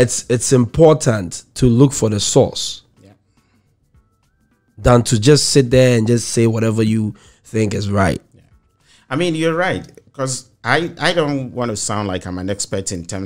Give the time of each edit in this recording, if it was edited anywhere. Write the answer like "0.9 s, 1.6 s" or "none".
none